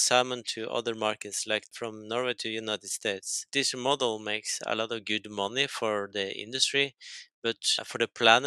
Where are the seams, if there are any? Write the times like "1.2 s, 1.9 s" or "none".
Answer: 1.7 s, 3.3 s